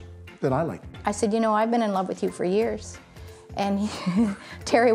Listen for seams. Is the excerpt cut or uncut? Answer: cut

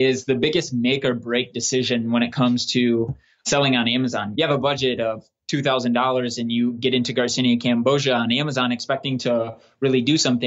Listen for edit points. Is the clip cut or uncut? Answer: cut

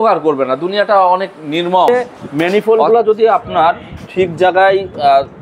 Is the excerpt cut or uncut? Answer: cut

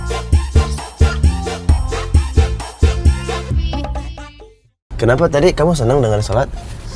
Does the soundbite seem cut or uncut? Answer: cut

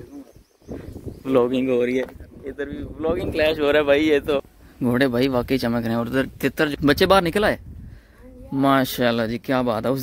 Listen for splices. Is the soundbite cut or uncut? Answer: cut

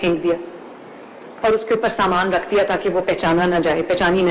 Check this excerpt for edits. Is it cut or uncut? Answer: uncut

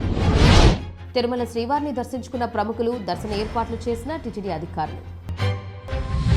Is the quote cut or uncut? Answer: cut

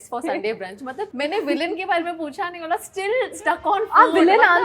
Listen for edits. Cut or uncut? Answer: cut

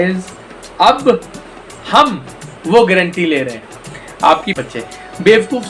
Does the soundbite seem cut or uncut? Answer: cut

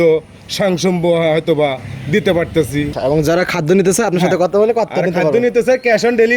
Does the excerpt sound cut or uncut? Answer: cut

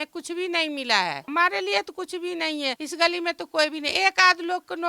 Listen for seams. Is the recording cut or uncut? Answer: cut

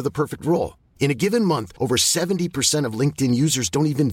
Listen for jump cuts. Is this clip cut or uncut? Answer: uncut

